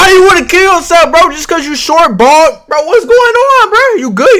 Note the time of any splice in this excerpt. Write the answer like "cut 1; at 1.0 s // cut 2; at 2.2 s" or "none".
none